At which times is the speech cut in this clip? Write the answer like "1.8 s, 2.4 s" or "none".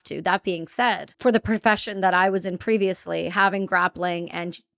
1.1 s